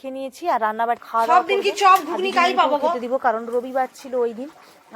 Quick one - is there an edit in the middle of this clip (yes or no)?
yes